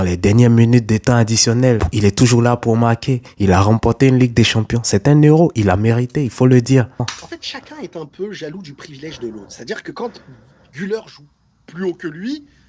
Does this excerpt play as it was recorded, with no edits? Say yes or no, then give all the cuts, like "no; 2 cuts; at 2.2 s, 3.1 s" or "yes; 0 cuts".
yes; 0 cuts